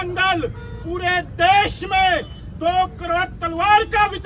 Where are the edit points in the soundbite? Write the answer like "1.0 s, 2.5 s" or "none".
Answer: none